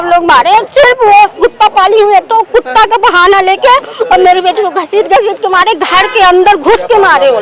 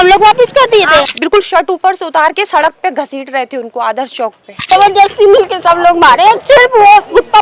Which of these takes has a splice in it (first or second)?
second